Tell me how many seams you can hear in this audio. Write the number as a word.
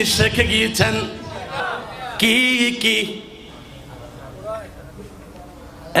one